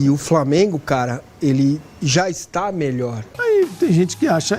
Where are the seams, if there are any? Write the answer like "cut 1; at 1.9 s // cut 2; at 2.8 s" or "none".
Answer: cut 1; at 3.3 s